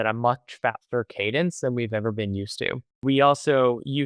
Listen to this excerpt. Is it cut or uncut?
cut